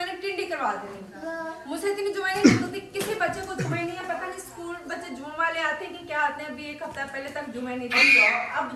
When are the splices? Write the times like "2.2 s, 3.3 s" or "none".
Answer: none